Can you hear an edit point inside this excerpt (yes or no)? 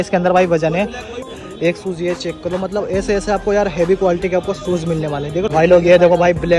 yes